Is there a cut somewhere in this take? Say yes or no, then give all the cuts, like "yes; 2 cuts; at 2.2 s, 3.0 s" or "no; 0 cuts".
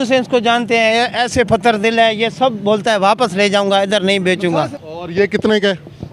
yes; 1 cut; at 4.8 s